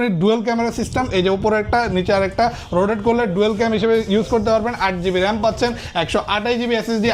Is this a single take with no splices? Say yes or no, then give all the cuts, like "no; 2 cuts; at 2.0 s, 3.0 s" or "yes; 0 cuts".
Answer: yes; 0 cuts